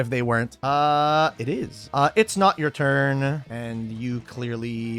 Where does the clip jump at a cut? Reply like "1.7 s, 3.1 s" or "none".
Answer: 1.8 s